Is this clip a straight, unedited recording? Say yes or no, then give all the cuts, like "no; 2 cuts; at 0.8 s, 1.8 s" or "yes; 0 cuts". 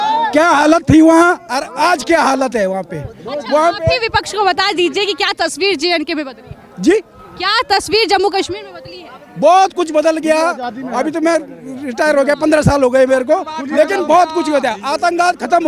yes; 0 cuts